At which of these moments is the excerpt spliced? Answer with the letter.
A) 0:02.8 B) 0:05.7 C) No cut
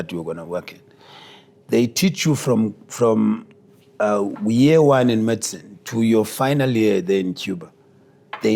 C